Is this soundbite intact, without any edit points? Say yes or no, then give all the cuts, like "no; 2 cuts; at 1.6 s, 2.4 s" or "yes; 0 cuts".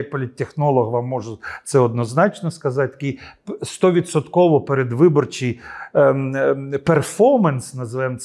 yes; 0 cuts